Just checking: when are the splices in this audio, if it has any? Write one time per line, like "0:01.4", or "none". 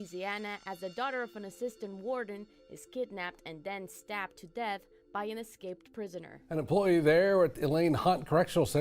0:06.6